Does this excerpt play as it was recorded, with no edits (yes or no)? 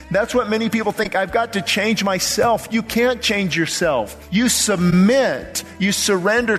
no